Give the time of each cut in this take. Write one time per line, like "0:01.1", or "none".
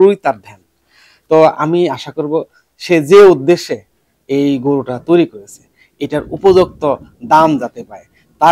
none